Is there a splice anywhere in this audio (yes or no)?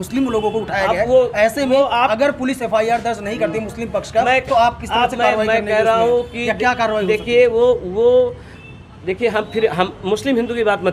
no